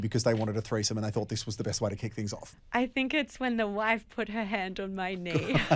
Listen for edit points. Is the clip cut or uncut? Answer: uncut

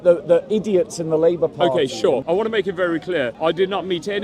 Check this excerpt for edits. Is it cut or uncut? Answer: cut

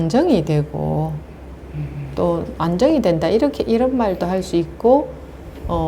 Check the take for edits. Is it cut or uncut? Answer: uncut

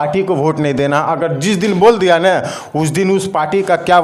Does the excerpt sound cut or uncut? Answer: uncut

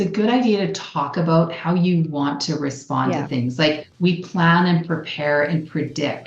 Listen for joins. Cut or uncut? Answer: cut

